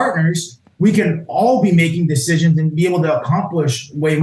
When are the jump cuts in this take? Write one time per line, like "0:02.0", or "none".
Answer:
none

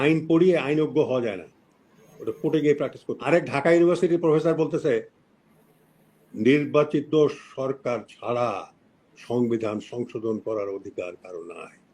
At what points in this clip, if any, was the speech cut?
0:03.1

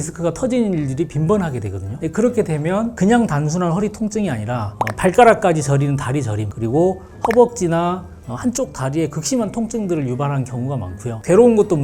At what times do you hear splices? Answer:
none

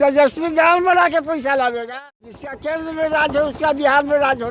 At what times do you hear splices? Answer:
0:02.5

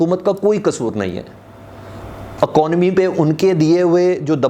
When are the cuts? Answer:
none

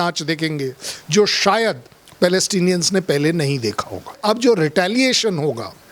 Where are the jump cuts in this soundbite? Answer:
0:04.2

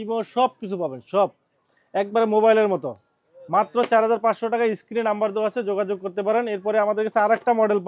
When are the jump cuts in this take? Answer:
none

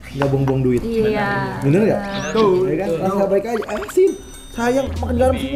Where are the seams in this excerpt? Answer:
none

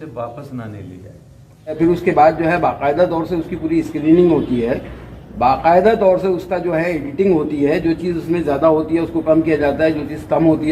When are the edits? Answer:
0:01.8

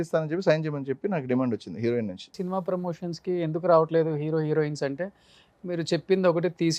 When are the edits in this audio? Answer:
0:02.4

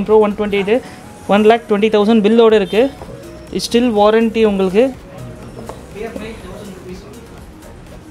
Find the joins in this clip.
none

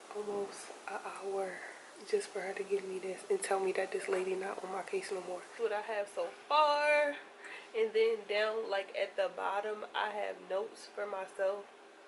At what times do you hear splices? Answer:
0:05.5

